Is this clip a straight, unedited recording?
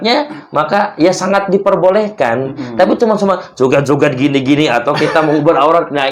yes; 0 cuts

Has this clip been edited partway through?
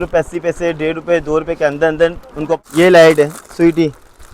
yes; 1 cut; at 2.6 s

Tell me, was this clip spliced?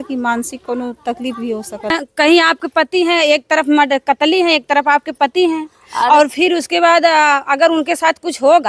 yes; 1 cut; at 1.9 s

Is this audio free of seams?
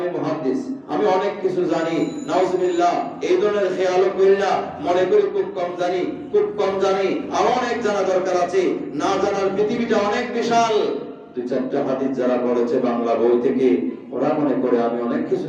yes; 0 cuts

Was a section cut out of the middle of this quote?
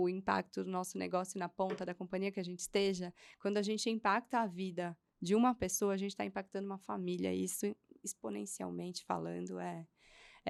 no; 0 cuts

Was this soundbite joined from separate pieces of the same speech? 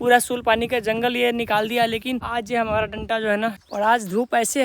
yes; 2 cuts; at 2.2 s, 3.6 s

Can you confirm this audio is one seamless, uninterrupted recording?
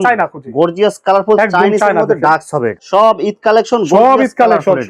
no; 1 cut; at 2.8 s

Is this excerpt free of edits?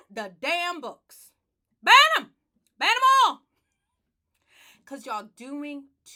yes; 0 cuts

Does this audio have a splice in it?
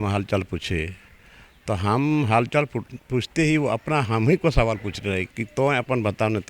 yes; 1 cut; at 5.3 s

